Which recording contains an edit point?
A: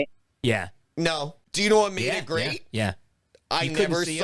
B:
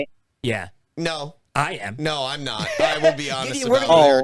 A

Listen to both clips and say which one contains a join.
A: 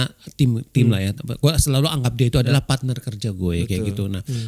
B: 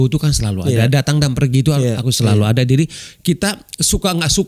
A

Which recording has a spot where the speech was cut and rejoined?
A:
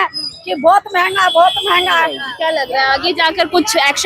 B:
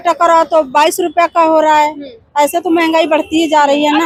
A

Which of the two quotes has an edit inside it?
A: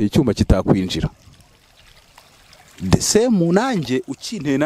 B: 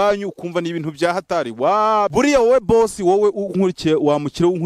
B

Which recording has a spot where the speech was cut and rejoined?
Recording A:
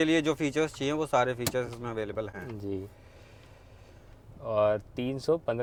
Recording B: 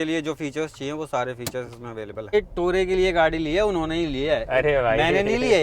B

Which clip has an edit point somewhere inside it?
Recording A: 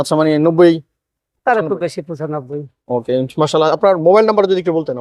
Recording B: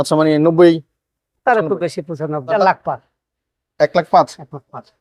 B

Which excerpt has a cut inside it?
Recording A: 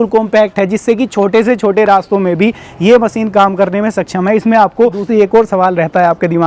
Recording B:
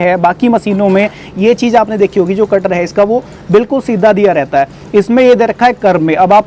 A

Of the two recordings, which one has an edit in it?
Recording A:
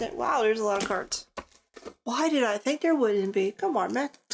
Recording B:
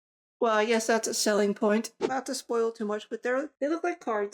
B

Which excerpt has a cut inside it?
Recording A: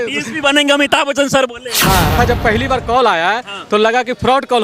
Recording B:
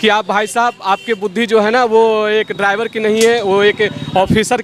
A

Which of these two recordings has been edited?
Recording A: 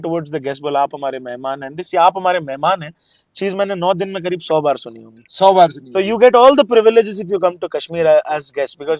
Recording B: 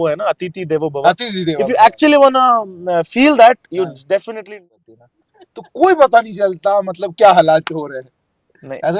B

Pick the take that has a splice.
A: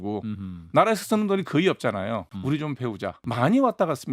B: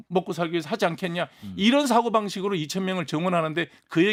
A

